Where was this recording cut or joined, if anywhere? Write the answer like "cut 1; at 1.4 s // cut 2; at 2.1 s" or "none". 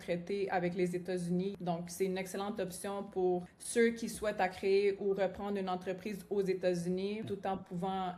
cut 1; at 1.6 s // cut 2; at 3.6 s // cut 3; at 7.3 s

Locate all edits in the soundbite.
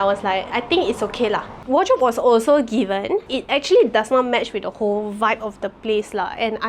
cut 1; at 1.6 s // cut 2; at 3.3 s

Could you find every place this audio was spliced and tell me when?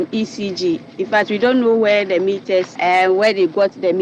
cut 1; at 2.7 s

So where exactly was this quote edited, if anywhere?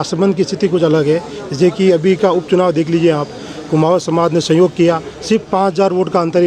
none

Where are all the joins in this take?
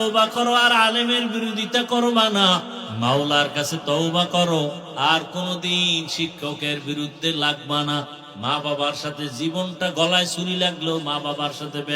cut 1; at 2.8 s // cut 2; at 8.2 s

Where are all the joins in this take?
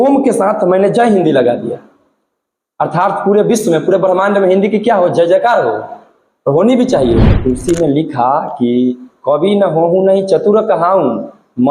cut 1; at 7.3 s

